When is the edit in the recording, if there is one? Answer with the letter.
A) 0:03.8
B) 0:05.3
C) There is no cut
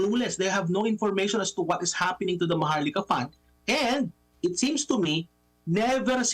C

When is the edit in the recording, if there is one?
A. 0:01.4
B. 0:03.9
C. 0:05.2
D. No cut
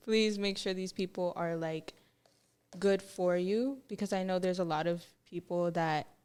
D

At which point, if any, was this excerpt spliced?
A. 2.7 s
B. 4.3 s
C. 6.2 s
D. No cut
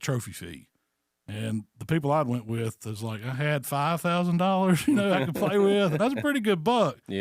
D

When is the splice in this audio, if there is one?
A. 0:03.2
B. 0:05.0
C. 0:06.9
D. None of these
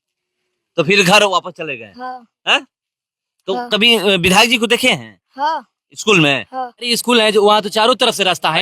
C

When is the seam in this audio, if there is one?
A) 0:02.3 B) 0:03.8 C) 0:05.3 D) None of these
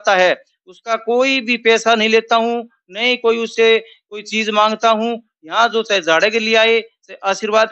D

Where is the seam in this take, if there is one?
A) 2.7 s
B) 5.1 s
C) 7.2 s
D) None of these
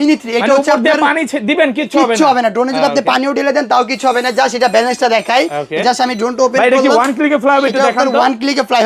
D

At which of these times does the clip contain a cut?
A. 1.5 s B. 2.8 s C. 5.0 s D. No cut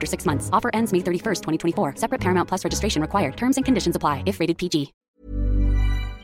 C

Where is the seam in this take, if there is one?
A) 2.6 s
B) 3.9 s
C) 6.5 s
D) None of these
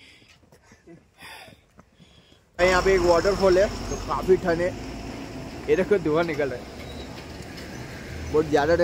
A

